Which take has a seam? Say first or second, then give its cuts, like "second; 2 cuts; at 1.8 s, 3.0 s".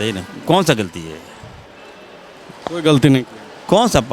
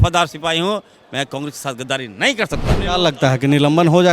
second; 1 cut; at 2.8 s